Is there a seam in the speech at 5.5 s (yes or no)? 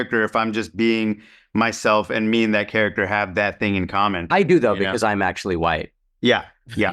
no